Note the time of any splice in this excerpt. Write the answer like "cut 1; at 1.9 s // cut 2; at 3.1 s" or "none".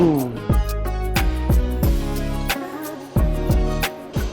none